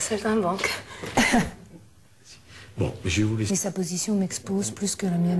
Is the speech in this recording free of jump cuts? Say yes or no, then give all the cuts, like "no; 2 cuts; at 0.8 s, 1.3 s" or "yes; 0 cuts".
yes; 0 cuts